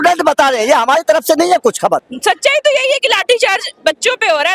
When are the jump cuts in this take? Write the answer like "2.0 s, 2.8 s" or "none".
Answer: 2.1 s